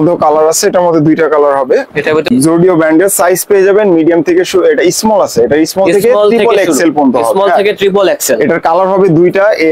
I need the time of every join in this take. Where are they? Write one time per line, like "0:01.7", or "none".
0:02.3